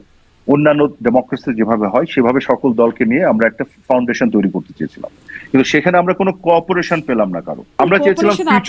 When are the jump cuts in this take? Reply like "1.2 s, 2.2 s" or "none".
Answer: 7.7 s